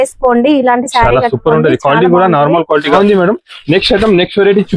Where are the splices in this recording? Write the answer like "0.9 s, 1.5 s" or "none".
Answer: 3.0 s

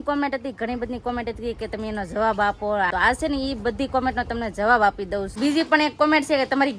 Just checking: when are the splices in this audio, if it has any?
2.9 s, 5.3 s

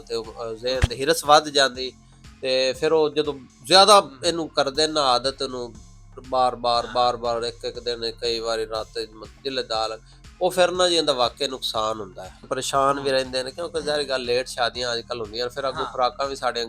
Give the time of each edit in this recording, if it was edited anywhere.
12.4 s

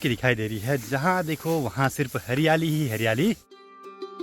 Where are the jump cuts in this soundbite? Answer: none

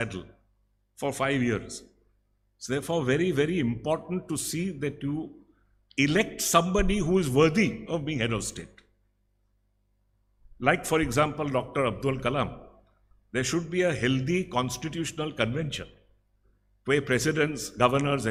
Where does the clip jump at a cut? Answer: none

